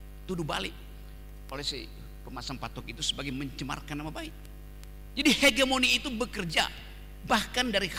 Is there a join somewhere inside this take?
no; 0 cuts

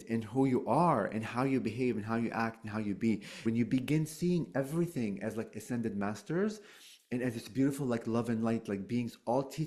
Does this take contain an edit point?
yes; 1 cut; at 3.4 s

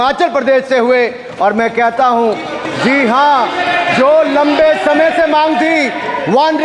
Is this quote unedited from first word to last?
yes; 0 cuts

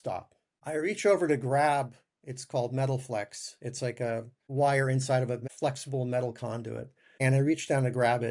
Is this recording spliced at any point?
no; 0 cuts

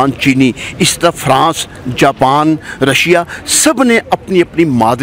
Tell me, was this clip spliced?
no; 0 cuts

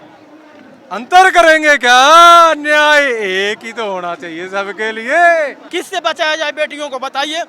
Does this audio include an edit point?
yes; 1 cut; at 5.6 s

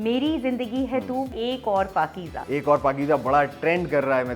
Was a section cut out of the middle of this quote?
yes; 2 cuts; at 1.3 s, 2.4 s

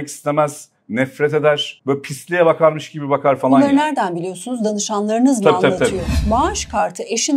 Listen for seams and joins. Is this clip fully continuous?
no; 2 cuts; at 1.7 s, 6.1 s

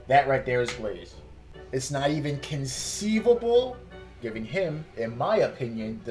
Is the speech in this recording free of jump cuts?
no; 1 cut; at 4.2 s

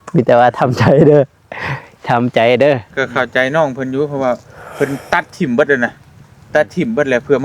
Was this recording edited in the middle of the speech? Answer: yes; 1 cut; at 3.0 s

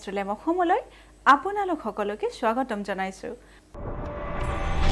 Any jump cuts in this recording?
no; 0 cuts

